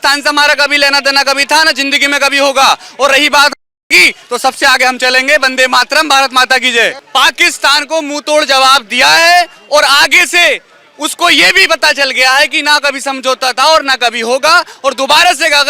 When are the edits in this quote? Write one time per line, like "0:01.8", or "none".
0:07.0